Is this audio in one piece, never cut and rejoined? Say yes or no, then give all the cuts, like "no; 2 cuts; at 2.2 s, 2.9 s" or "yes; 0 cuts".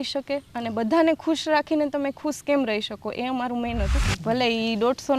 no; 1 cut; at 4.1 s